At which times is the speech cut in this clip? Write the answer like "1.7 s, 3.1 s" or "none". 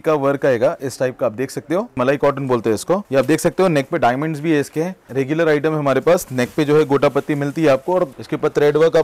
2.0 s, 3.0 s, 5.1 s, 8.2 s